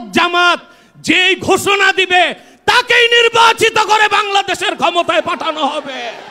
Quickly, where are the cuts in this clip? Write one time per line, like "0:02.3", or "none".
none